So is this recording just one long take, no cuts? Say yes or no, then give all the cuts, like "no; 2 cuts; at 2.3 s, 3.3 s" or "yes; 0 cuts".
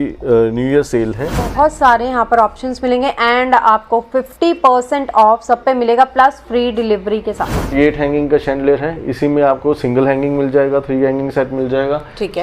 no; 2 cuts; at 1.5 s, 7.7 s